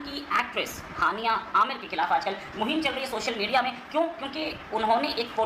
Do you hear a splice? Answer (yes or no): no